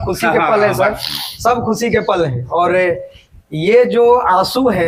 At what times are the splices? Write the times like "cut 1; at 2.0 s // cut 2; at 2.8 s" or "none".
none